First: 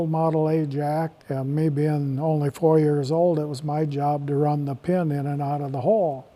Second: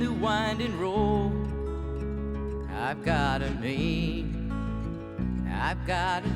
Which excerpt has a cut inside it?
first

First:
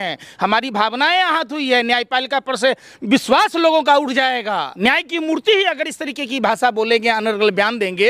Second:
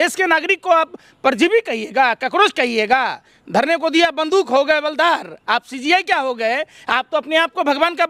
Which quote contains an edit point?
first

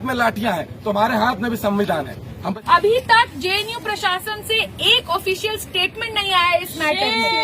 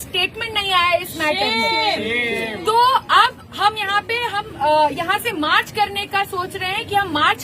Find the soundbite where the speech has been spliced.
first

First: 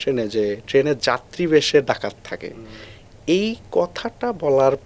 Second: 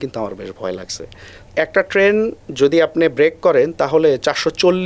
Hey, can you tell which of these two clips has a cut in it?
second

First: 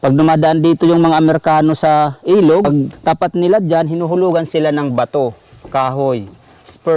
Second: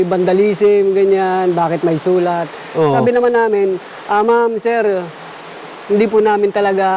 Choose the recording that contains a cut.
first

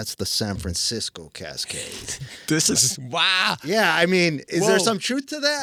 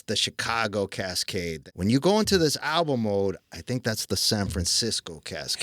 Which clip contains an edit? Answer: second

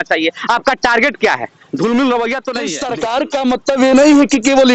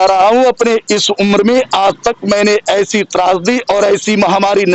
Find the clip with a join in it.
first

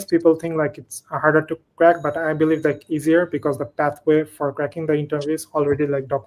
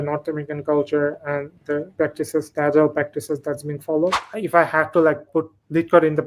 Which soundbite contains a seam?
second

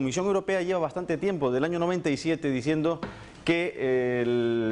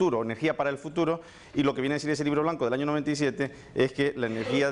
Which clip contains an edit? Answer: second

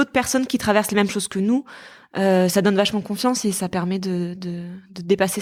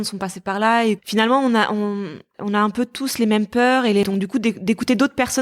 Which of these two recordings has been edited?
second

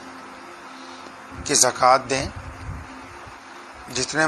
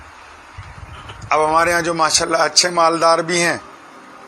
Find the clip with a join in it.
second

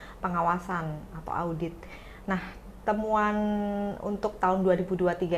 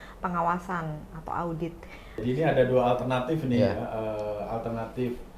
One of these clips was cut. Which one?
second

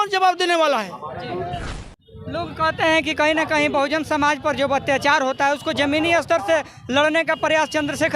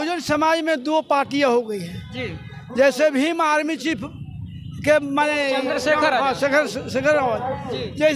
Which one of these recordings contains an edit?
first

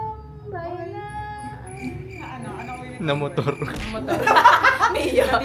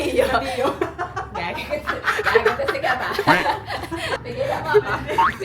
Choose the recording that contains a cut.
second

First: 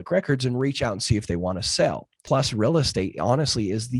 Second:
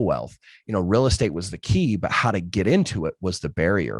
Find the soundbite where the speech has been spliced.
first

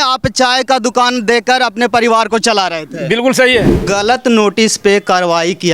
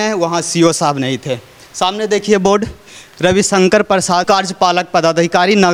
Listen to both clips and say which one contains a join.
first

